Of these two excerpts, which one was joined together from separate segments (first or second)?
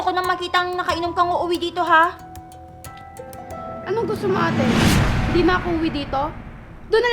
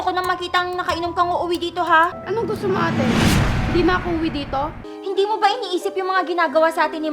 second